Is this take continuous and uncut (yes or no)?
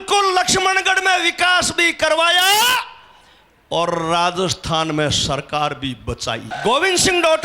no